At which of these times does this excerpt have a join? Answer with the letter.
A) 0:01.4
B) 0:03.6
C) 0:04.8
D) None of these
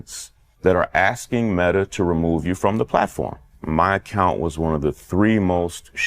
B